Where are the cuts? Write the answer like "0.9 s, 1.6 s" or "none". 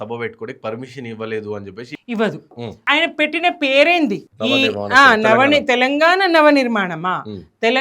1.9 s, 2.7 s